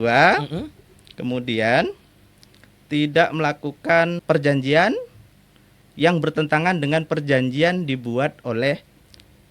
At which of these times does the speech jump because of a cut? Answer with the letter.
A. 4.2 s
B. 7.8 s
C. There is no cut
A